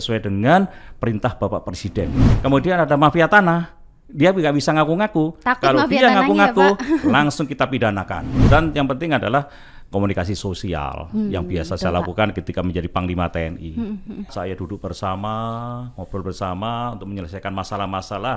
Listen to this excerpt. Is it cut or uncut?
cut